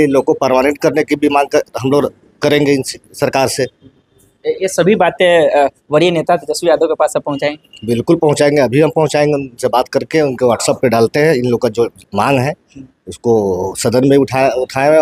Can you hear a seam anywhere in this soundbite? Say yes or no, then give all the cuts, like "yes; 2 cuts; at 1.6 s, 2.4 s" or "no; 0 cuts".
no; 0 cuts